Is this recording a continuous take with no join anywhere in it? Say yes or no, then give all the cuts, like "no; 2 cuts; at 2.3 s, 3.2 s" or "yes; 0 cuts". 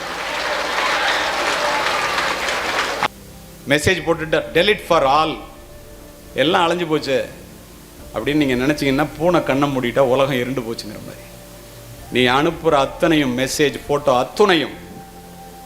no; 1 cut; at 3.1 s